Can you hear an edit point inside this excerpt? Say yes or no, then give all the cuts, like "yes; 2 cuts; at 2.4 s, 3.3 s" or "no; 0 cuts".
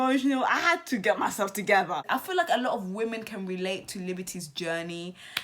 yes; 1 cut; at 2.0 s